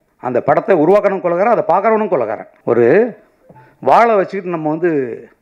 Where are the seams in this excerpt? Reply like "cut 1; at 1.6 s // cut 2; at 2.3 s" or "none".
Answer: cut 1; at 2.5 s